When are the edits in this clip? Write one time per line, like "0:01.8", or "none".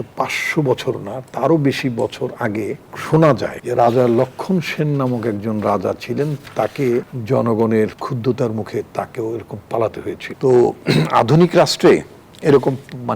0:02.9
0:03.6
0:07.1
0:08.0
0:10.3